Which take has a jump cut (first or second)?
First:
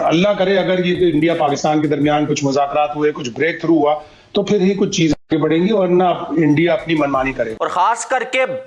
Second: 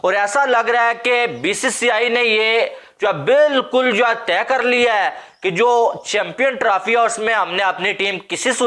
first